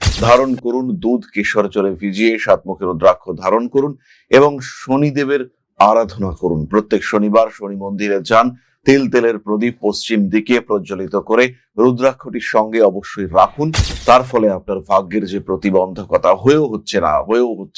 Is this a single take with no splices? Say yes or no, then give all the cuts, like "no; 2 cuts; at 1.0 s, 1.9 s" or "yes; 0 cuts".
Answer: yes; 0 cuts